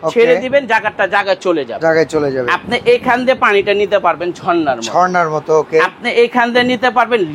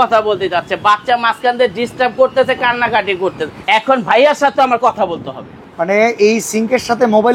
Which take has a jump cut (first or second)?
second